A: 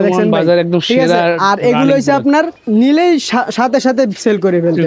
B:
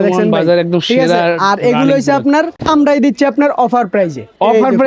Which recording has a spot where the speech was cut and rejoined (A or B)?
B